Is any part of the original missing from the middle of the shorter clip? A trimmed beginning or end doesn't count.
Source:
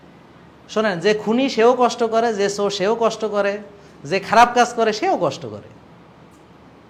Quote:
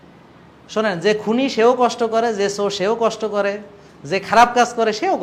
no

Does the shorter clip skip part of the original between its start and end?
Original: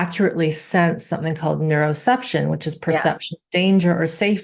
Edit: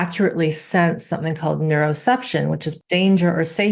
yes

